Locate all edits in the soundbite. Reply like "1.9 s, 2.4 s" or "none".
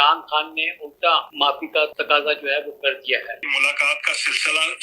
2.0 s, 3.5 s

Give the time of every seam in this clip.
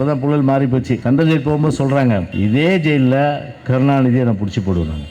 1.0 s, 2.3 s

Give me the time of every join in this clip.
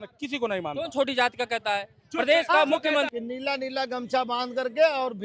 3.1 s

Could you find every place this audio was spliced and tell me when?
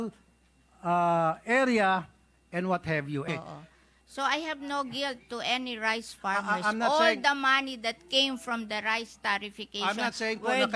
3.2 s

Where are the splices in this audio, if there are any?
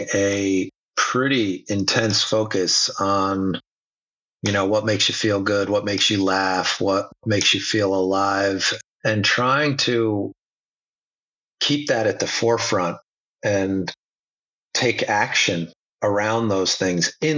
7.2 s, 8.7 s

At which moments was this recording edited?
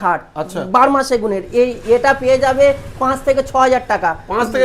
none

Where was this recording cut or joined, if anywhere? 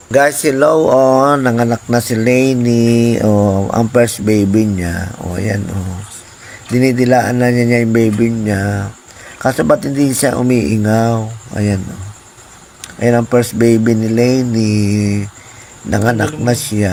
none

